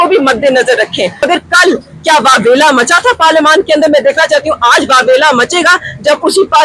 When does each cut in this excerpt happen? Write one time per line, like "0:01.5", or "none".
0:01.2